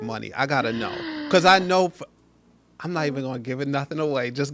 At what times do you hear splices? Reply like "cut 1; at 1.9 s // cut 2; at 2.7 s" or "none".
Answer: none

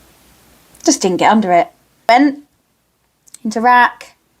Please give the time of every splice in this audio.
cut 1; at 2.1 s

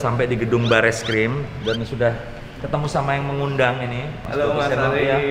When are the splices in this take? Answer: none

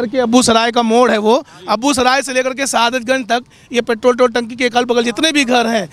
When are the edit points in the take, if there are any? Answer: none

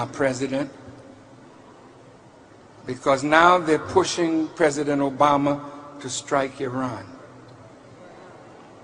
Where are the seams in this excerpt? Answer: cut 1; at 4.5 s

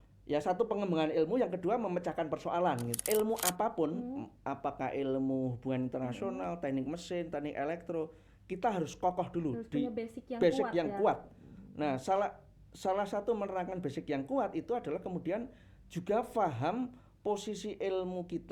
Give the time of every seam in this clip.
cut 1; at 3.0 s

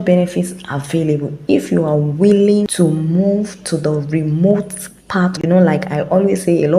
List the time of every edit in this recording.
cut 1; at 2.7 s // cut 2; at 5.3 s

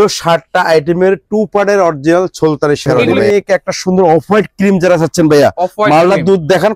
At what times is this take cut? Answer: cut 1; at 3.2 s

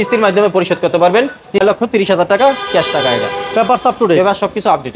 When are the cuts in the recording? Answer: cut 1; at 1.6 s

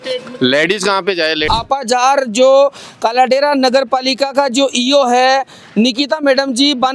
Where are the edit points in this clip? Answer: cut 1; at 1.5 s

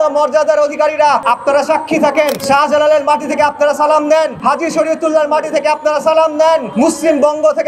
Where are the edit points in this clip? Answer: cut 1; at 1.2 s // cut 2; at 2.4 s // cut 3; at 4.4 s // cut 4; at 6.7 s

